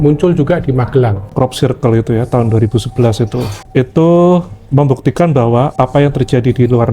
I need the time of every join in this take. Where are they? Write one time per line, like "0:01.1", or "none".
0:01.3